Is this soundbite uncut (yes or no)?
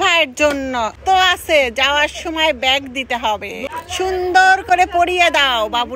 no